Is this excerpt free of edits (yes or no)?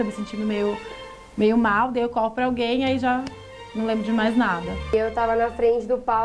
yes